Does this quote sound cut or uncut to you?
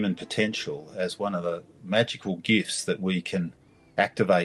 uncut